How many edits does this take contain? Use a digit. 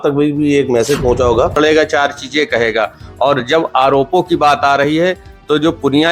1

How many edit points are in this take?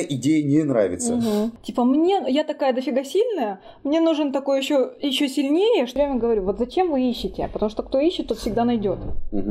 2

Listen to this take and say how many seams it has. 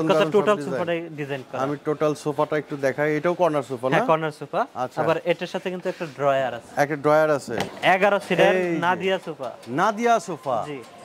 1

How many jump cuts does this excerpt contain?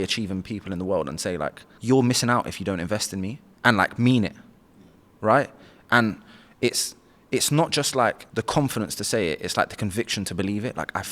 3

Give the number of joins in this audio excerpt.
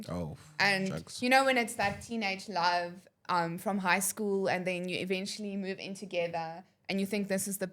0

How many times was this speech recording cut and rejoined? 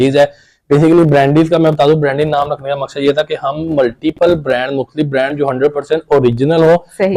0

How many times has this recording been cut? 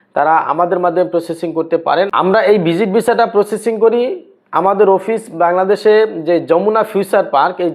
1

